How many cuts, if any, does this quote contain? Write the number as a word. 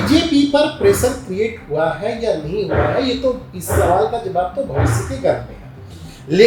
zero